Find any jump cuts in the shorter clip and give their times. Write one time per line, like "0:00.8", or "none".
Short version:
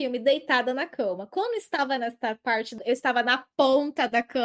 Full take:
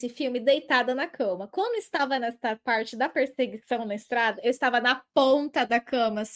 0:02.8